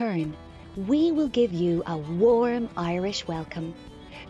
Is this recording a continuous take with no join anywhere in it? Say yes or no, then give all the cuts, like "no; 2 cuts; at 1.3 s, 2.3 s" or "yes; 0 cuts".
yes; 0 cuts